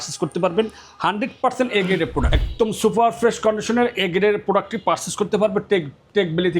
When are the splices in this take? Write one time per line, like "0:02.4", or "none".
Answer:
0:02.4

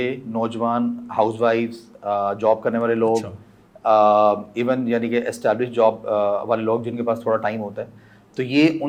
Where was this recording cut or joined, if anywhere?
none

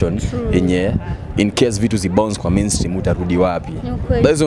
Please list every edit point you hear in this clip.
none

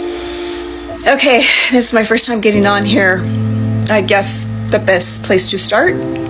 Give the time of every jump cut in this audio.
none

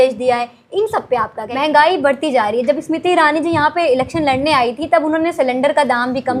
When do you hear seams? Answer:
0:01.4

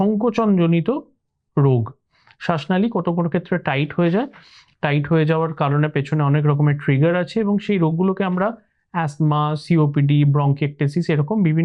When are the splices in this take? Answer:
none

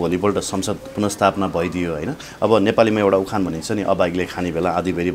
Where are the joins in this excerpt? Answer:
none

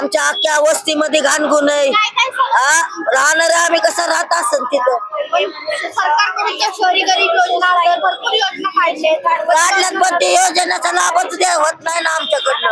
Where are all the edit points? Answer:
none

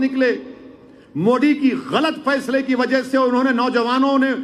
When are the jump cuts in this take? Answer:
none

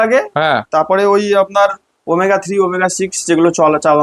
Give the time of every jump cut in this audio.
none

